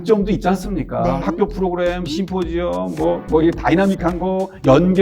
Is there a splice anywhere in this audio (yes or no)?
yes